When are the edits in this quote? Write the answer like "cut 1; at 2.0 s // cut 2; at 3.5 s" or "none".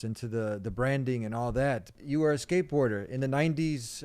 cut 1; at 1.9 s